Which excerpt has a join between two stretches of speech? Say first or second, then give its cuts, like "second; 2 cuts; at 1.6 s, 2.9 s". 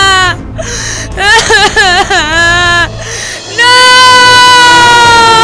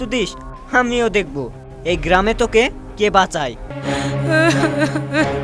second; 1 cut; at 3.7 s